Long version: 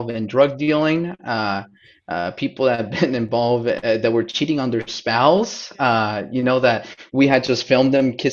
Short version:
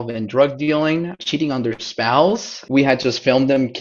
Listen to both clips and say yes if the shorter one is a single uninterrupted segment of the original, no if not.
no